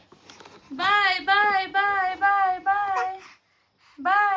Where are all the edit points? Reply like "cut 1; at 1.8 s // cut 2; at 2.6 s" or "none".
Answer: none